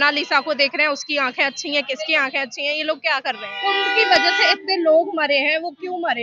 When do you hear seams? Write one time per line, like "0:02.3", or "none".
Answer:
0:03.5